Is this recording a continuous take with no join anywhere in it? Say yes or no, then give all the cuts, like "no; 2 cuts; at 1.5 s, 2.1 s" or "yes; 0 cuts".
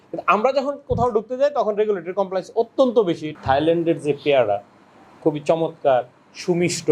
no; 1 cut; at 3.3 s